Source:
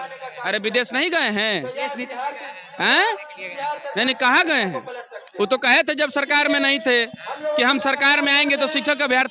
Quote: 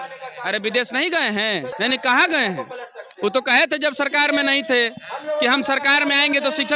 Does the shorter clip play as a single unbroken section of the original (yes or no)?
no